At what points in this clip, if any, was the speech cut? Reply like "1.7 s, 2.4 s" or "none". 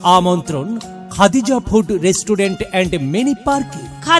none